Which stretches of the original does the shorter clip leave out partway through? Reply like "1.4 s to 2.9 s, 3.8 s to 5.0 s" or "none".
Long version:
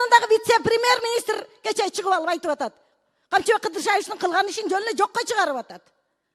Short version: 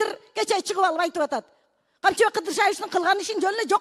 none

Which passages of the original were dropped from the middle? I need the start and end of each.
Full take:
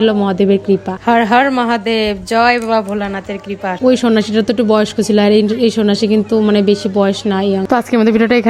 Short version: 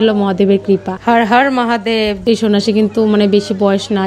2.2 s to 5.6 s

